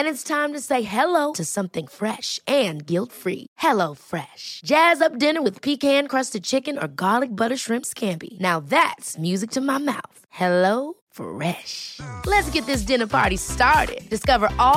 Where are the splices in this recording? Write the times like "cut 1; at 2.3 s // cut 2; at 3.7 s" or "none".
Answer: none